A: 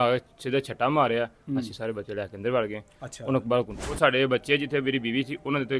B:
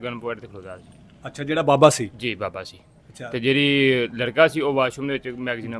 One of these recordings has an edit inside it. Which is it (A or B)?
A